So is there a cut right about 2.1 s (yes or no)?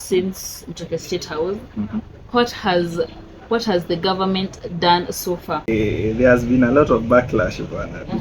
no